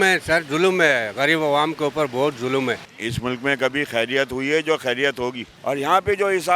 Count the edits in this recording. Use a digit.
2